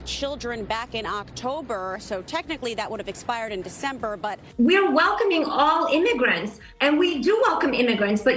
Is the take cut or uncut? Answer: cut